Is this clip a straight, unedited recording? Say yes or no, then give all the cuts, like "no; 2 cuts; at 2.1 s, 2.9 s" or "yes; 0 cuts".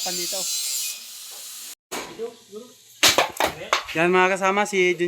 no; 1 cut; at 1.8 s